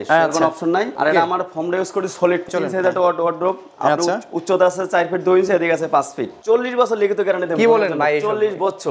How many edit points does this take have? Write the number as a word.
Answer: three